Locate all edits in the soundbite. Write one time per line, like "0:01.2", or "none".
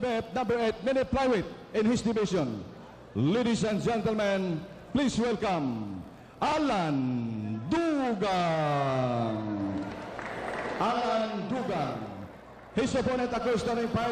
0:09.8